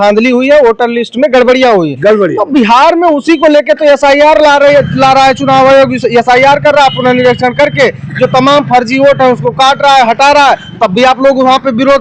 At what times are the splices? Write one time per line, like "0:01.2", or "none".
none